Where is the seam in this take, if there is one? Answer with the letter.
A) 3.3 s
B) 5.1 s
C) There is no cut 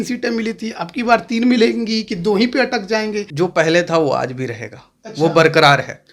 A